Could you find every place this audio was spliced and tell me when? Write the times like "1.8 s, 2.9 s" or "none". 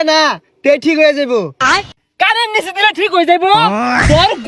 1.8 s